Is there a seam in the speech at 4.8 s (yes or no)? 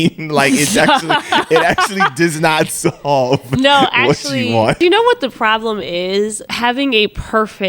yes